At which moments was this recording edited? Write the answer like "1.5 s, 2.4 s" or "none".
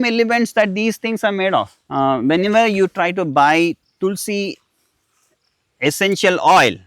1.8 s